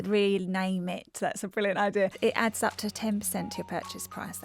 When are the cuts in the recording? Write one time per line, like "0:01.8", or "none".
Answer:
0:02.2